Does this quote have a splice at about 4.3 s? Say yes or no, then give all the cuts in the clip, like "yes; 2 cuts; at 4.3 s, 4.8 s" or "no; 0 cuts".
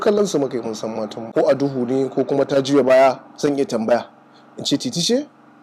no; 1 cut; at 1.3 s